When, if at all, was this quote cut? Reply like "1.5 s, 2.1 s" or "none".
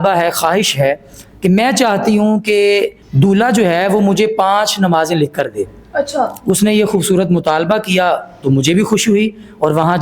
none

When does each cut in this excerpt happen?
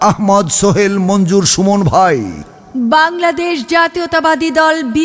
2.7 s

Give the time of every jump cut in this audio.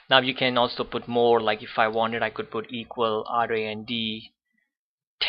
1.9 s

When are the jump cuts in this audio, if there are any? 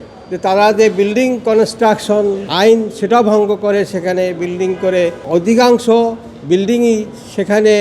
2.4 s, 5.2 s

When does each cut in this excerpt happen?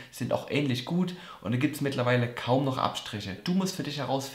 3.4 s

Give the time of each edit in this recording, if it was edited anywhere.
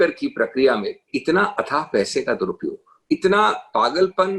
1.1 s, 2.9 s

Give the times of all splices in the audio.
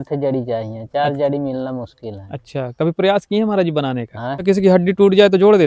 4.4 s

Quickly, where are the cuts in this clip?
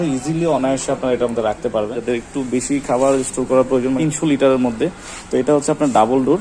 2.0 s

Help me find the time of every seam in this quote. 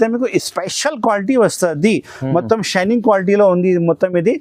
none

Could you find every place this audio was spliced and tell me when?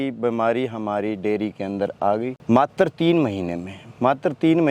2.4 s

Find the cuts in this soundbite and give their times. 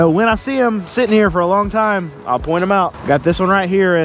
3.0 s

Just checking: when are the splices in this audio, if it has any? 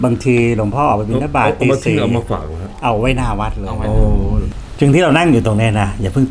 4.6 s

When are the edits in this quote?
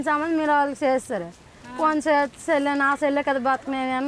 none

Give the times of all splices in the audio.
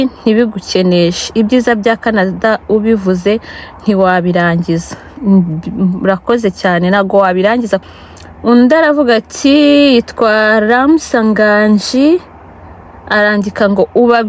7.9 s

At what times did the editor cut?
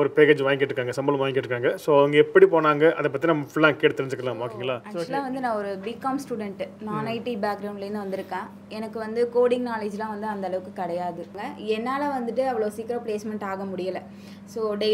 4.9 s, 11.3 s

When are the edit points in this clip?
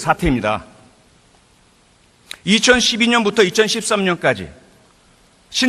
4.0 s

